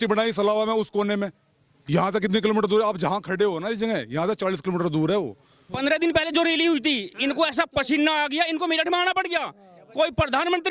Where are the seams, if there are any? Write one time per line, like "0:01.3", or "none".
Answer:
0:05.8